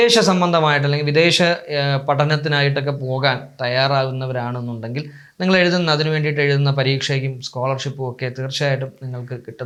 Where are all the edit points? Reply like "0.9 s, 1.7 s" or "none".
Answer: none